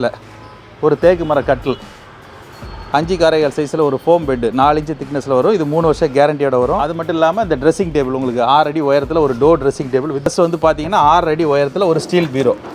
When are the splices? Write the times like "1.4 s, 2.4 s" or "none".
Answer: 6.9 s, 10.3 s